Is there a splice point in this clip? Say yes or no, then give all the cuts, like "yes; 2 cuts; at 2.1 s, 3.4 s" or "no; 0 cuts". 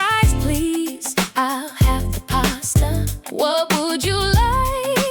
no; 0 cuts